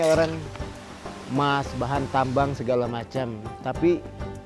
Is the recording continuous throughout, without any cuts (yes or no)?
yes